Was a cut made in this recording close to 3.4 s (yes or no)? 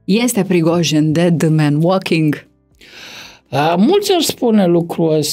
no